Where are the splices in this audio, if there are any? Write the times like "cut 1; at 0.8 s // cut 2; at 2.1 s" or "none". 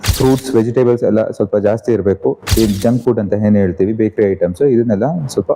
cut 1; at 2.4 s